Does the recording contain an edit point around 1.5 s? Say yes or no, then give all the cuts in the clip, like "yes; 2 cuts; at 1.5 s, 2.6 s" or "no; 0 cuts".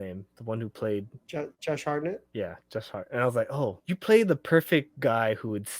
yes; 3 cuts; at 1.5 s, 2.2 s, 3.8 s